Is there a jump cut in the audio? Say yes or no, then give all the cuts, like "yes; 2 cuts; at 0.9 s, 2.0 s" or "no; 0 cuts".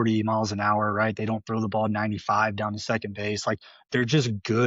no; 0 cuts